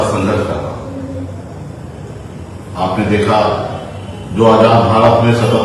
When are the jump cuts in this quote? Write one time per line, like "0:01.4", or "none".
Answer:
none